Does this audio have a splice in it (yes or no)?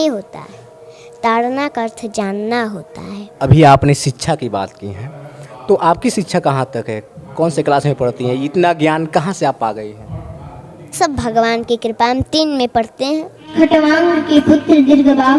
yes